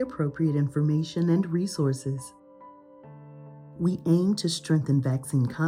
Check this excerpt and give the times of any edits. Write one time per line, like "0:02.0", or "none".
none